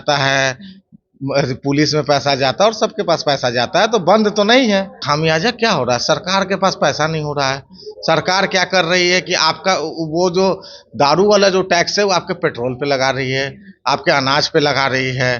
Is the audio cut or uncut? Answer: cut